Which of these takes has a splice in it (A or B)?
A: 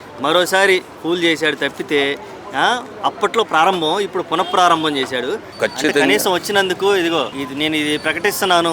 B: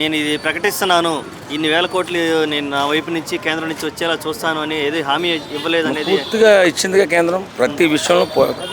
A